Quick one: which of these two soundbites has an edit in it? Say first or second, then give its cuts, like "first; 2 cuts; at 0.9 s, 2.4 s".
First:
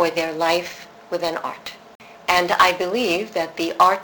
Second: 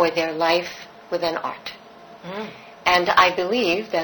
first; 1 cut; at 2.1 s